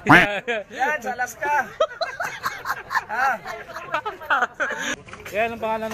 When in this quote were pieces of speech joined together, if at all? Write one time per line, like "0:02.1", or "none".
0:05.0